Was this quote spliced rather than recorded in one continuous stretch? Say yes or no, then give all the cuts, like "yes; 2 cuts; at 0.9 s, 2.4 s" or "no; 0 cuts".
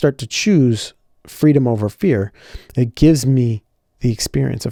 no; 0 cuts